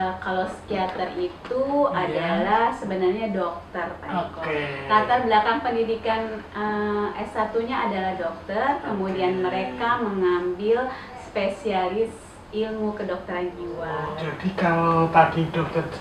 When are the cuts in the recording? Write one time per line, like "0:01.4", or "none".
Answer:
0:14.2